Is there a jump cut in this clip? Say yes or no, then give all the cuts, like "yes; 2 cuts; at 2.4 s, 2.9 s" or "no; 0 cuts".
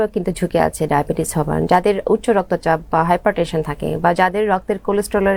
no; 0 cuts